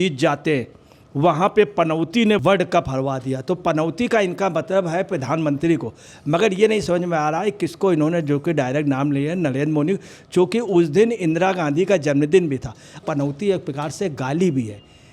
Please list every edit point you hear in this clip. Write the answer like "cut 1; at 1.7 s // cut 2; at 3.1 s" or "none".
cut 1; at 2.4 s // cut 2; at 13.0 s